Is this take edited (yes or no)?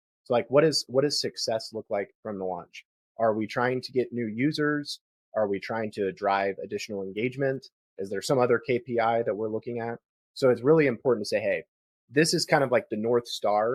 no